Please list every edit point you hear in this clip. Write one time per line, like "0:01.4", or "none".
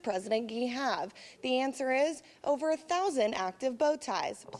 none